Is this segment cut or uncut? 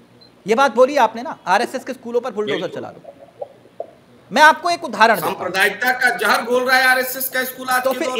uncut